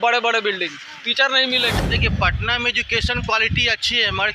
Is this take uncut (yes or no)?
no